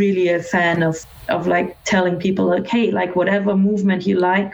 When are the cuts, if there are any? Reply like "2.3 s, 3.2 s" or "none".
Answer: 1.1 s